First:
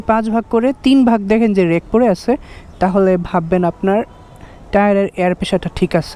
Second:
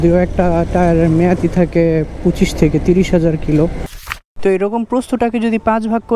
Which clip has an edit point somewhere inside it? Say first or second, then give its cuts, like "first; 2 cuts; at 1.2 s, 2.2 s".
second; 1 cut; at 4.1 s